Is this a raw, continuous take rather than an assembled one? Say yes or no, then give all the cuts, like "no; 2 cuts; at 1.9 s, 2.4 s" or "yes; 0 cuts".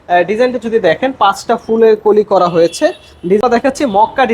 no; 1 cut; at 3.4 s